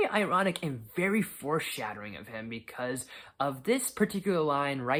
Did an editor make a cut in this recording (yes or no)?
no